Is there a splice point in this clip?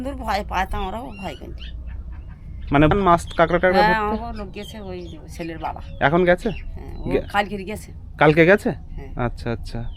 yes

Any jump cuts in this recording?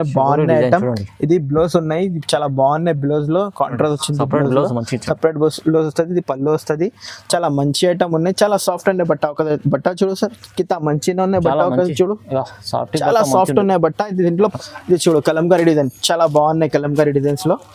yes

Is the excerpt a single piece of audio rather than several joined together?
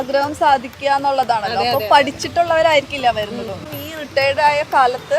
no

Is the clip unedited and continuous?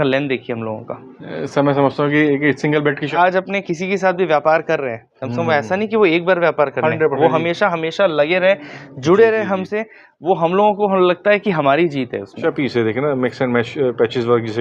no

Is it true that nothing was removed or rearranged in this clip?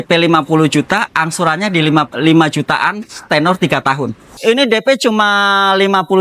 no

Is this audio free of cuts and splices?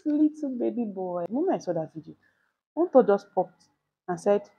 no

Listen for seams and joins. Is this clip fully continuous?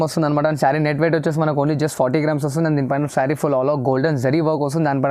yes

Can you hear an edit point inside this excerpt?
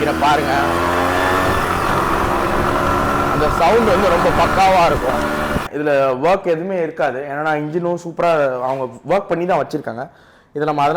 yes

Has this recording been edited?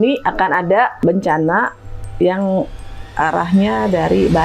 yes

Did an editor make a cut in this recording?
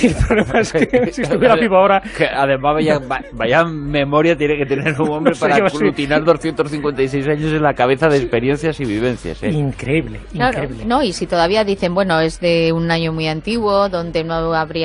yes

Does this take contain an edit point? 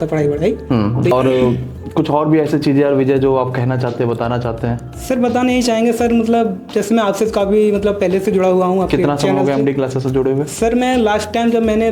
yes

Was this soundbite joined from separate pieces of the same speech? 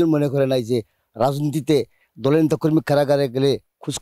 no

